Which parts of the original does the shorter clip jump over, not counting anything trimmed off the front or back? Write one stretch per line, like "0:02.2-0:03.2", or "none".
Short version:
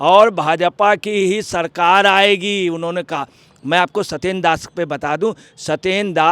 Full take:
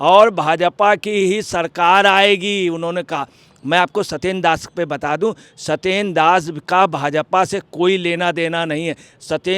none